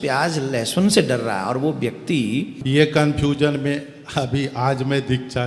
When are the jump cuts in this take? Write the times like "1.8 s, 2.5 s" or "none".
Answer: 2.6 s